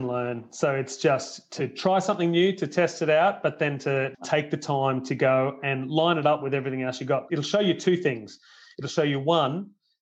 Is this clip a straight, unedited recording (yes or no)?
no